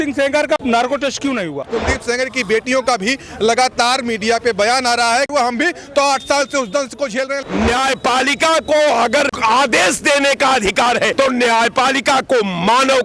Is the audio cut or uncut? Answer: cut